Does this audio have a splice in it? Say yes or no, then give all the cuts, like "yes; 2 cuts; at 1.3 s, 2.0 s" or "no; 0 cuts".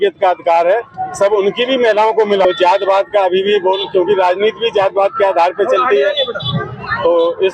yes; 1 cut; at 2.4 s